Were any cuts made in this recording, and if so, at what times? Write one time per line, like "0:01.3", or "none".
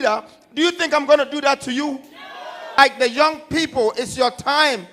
0:02.8